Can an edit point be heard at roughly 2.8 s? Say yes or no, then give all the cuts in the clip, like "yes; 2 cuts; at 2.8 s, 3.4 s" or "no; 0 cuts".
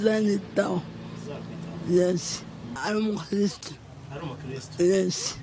yes; 1 cut; at 2.8 s